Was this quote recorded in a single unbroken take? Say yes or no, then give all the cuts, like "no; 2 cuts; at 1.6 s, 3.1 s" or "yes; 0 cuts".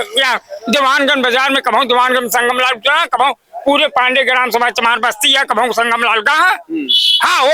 yes; 0 cuts